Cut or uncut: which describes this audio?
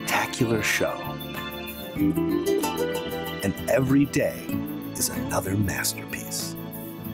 uncut